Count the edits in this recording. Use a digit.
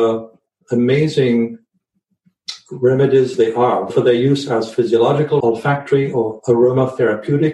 1